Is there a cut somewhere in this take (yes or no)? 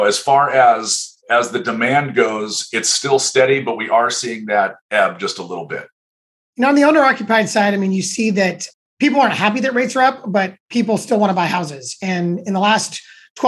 no